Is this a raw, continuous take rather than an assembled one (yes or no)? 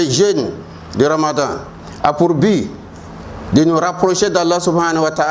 yes